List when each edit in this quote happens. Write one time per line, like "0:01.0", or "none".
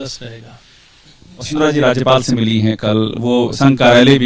0:01.5